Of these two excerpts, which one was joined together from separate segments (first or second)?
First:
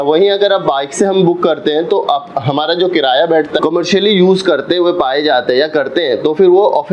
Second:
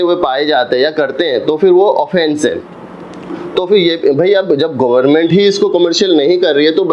first